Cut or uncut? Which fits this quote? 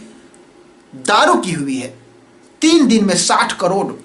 uncut